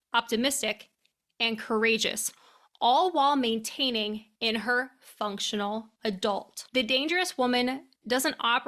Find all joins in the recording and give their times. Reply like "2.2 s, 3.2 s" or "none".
6.6 s